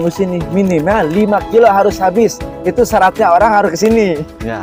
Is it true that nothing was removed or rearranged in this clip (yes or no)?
yes